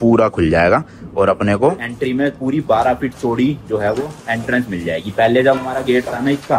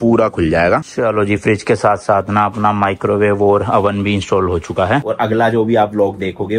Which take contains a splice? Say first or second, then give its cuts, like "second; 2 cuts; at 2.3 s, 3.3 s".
second; 2 cuts; at 0.9 s, 5.0 s